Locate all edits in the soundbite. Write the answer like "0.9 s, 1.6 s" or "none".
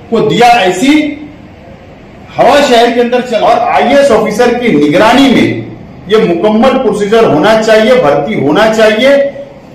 3.3 s